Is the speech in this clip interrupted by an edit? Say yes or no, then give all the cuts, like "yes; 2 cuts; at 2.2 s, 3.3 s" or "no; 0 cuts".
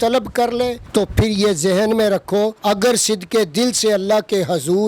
yes; 2 cuts; at 0.8 s, 2.6 s